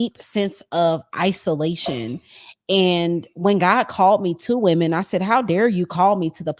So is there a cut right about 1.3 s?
no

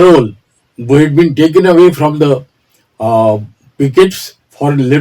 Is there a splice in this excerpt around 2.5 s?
no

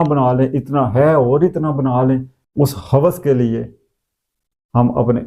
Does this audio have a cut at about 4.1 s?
no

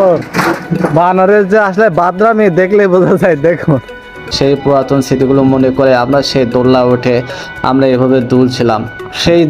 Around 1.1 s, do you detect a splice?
no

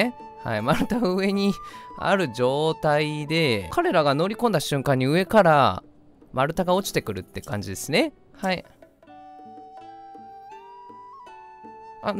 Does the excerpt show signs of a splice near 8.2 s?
yes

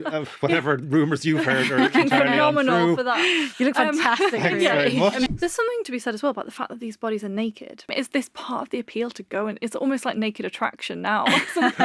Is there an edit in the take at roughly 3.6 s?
no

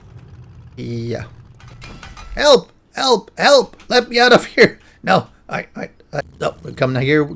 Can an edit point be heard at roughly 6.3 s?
yes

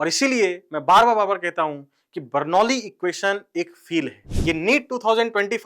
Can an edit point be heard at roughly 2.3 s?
no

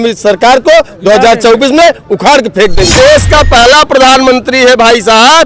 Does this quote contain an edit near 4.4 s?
no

